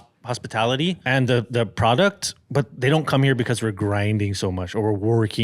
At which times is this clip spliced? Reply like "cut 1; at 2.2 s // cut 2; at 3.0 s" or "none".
cut 1; at 1.0 s // cut 2; at 2.7 s